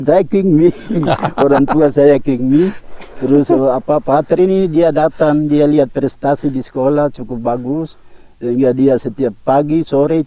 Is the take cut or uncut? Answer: uncut